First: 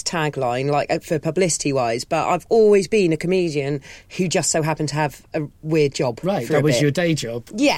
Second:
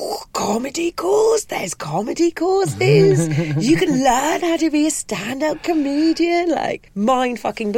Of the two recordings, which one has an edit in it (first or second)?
second